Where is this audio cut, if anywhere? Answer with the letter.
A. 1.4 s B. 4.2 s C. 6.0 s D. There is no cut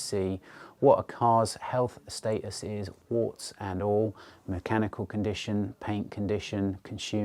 D